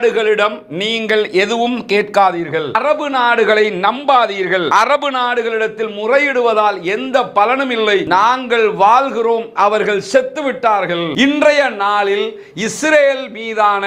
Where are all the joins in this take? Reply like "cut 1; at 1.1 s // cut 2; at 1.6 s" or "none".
cut 1; at 2.8 s // cut 2; at 4.7 s // cut 3; at 8.1 s // cut 4; at 11.1 s